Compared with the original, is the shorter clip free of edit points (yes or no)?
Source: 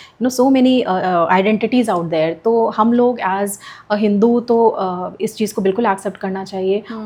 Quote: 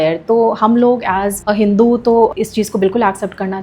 no